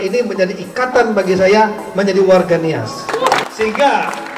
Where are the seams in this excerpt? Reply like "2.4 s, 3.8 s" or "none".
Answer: 3.4 s